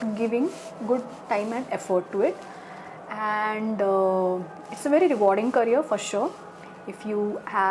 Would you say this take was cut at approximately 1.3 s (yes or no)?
no